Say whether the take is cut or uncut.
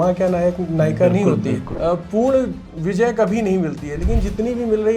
cut